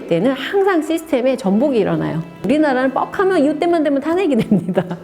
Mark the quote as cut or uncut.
cut